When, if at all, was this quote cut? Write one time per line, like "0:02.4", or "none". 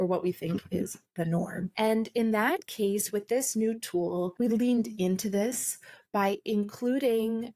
0:01.7
0:04.3